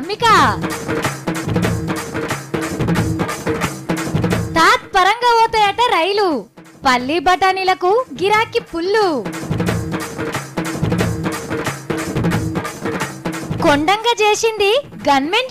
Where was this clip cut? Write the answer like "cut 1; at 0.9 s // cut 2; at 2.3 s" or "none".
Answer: cut 1; at 1.5 s // cut 2; at 3.2 s